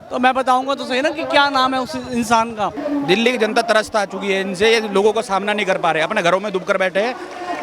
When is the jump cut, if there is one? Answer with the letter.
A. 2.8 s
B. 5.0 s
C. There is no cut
A